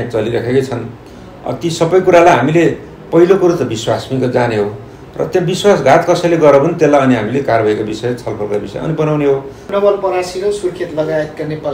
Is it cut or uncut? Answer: cut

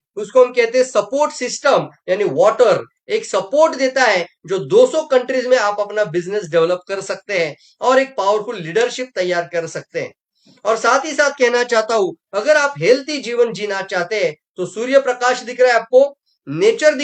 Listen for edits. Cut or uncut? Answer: uncut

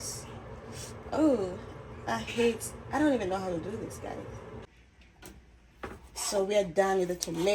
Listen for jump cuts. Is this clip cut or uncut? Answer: cut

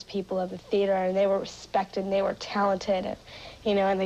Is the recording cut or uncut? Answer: uncut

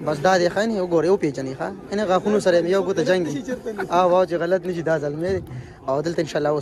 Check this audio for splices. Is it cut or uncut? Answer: uncut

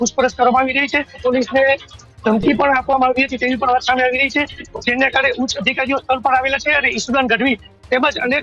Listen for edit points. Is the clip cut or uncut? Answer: cut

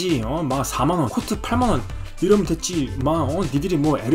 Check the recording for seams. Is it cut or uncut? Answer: cut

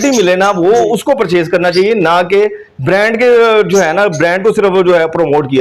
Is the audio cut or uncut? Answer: uncut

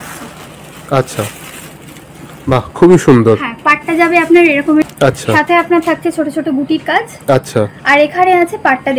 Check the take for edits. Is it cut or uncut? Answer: cut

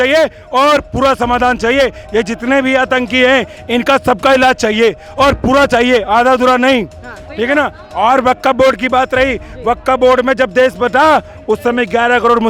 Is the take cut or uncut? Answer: uncut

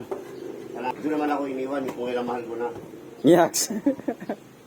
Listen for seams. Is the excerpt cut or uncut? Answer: cut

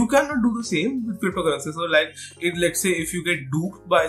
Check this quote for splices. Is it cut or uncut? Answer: uncut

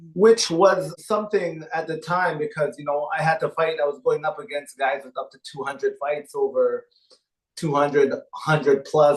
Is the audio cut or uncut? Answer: cut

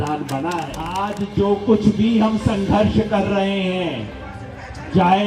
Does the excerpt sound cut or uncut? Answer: cut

